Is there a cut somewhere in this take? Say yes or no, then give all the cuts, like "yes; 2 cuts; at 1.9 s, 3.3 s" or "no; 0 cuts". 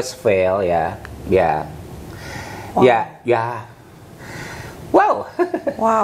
no; 0 cuts